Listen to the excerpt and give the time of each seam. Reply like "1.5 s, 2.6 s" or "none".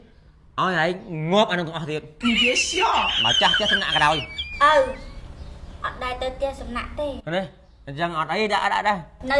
4.4 s